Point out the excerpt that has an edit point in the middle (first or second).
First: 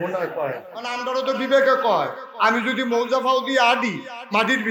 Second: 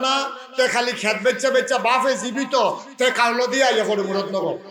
first